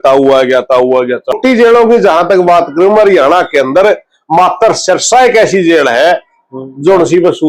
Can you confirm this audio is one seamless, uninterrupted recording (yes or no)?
no